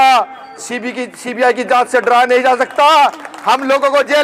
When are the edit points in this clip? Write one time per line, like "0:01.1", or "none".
none